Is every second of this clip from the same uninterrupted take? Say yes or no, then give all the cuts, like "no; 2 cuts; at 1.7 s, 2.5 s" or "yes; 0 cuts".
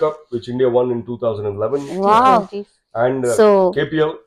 yes; 0 cuts